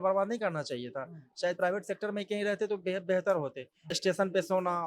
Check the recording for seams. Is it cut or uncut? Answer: cut